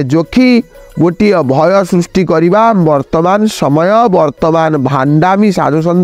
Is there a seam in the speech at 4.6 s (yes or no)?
no